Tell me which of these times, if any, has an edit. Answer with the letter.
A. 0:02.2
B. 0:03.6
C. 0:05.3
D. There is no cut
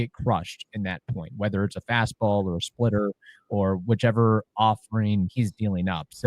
C